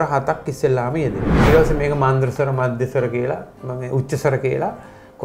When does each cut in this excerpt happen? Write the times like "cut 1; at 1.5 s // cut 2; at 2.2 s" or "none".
cut 1; at 1.3 s